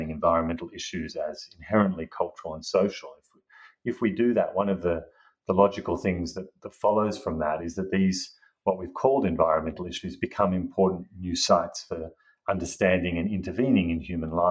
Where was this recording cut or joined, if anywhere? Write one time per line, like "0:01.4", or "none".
none

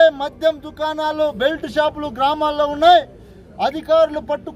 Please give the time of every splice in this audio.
none

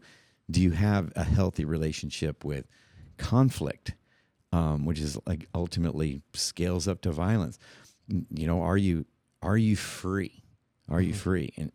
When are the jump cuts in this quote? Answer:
none

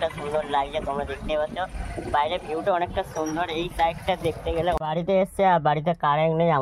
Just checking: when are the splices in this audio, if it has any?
0:04.8

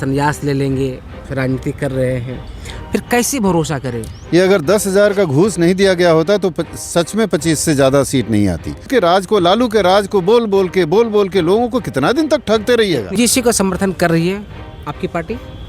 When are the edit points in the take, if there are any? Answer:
0:08.9
0:13.2

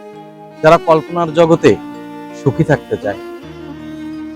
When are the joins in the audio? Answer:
0:03.2

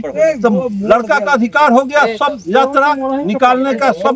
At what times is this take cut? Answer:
none

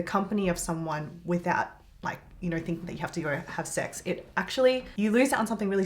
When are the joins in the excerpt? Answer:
0:04.9

